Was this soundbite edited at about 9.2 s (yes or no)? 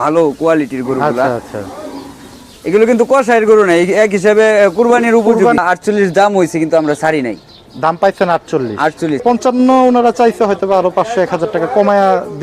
yes